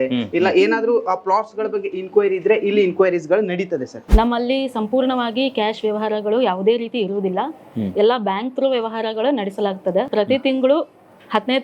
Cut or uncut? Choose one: cut